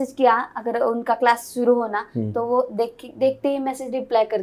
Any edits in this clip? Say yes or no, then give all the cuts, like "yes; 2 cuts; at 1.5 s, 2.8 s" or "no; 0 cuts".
no; 0 cuts